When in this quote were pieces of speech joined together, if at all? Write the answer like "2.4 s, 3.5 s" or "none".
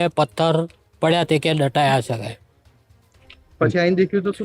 none

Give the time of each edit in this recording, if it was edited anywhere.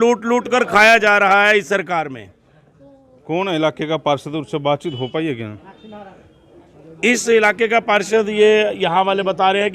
none

